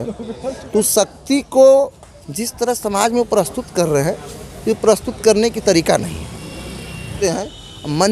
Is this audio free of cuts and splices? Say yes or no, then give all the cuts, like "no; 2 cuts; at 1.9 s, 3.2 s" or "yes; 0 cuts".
no; 1 cut; at 7.1 s